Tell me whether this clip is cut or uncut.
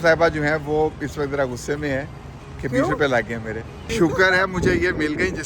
cut